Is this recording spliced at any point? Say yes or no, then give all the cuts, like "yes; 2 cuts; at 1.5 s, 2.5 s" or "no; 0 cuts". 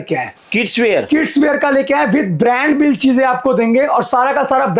no; 0 cuts